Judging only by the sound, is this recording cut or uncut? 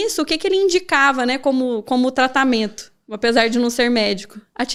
uncut